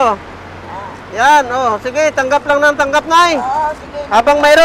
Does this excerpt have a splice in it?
no; 0 cuts

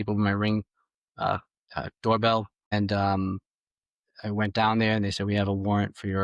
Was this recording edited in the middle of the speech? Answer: yes; 1 cut; at 2.7 s

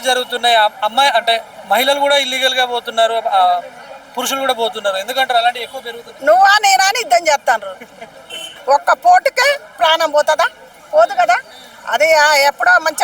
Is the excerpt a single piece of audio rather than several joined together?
no; 1 cut; at 8.5 s

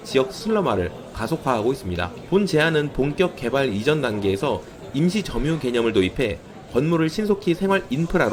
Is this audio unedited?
yes; 0 cuts

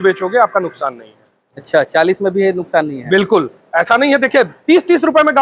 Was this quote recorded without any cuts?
yes; 0 cuts

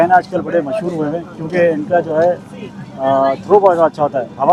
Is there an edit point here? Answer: no; 0 cuts

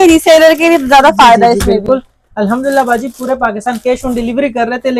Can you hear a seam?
no; 0 cuts

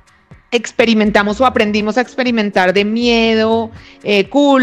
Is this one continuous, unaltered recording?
yes; 0 cuts

